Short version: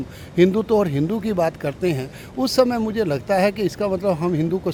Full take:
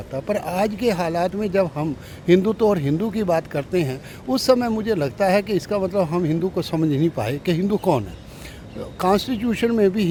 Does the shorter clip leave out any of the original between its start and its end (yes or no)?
no